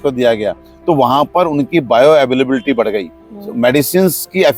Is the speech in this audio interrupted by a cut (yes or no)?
no